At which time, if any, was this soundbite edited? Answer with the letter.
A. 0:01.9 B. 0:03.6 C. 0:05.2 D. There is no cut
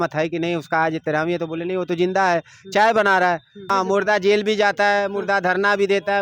B